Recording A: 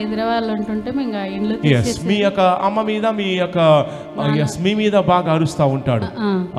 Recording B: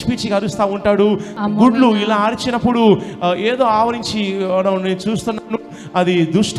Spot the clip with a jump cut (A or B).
B